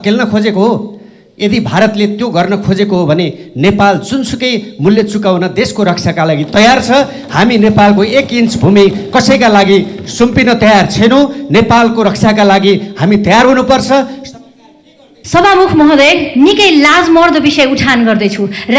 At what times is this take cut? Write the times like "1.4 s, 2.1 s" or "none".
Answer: 15.2 s